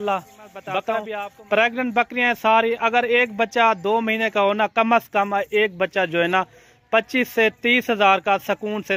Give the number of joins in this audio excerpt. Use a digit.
1